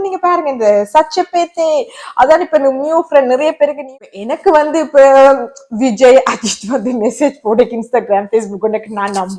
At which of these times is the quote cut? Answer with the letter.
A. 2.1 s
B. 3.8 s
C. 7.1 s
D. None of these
B